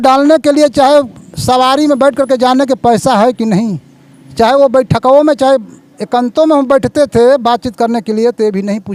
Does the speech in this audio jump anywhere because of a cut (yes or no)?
no